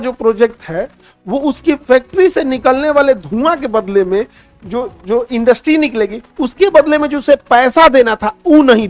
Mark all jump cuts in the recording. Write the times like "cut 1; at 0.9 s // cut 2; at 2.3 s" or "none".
none